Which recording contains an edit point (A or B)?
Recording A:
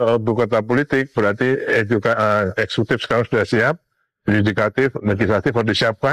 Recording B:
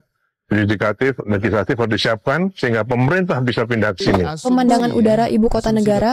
B